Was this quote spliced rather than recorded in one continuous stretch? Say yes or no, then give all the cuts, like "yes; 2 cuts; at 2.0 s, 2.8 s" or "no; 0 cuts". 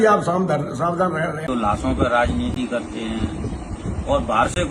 yes; 1 cut; at 1.5 s